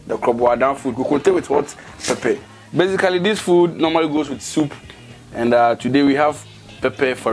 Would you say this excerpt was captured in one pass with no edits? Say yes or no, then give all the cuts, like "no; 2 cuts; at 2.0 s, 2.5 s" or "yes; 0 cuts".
no; 1 cut; at 2.5 s